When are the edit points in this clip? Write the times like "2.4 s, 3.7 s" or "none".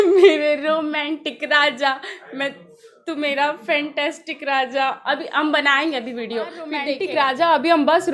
6.9 s